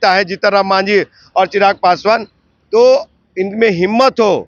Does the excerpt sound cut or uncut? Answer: uncut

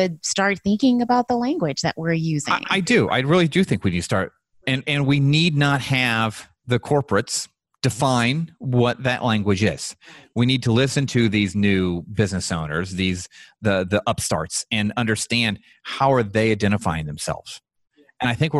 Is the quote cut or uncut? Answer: uncut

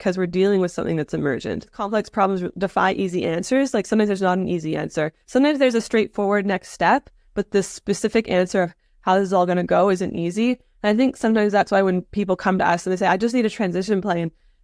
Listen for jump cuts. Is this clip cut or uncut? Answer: cut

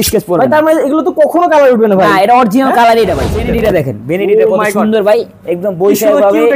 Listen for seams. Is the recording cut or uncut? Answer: cut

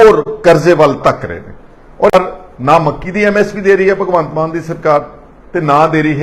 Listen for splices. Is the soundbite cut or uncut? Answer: cut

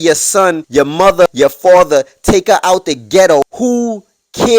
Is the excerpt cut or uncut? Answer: cut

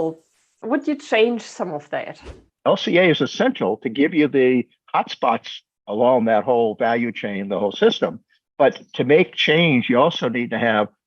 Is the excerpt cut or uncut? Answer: cut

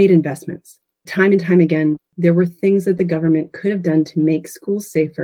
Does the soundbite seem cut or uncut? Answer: cut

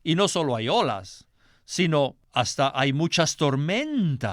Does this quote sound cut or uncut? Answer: cut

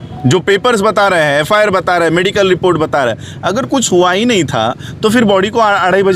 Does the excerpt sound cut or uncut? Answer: uncut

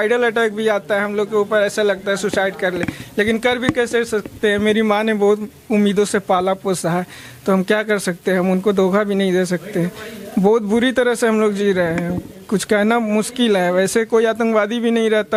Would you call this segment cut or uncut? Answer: uncut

